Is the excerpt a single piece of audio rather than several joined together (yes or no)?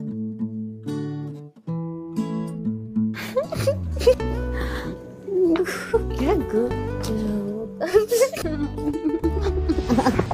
no